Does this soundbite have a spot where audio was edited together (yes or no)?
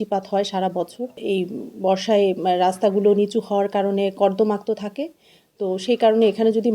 no